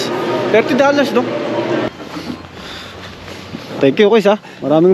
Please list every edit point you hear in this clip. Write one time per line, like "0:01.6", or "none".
0:01.9